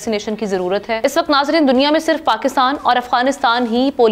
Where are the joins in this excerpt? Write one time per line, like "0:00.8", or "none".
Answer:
none